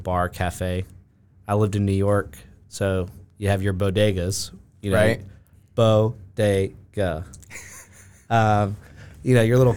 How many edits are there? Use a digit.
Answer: 0